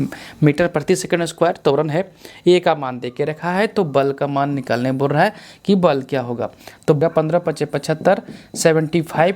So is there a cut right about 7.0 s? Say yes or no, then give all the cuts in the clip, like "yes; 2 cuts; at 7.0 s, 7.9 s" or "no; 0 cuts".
yes; 1 cut; at 7.0 s